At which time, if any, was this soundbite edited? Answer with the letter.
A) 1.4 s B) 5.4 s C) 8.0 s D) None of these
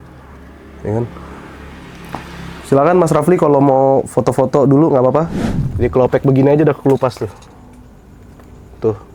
B